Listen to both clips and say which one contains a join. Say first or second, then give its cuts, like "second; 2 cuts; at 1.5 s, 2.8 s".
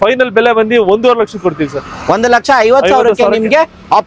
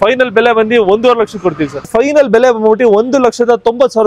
second; 1 cut; at 1.9 s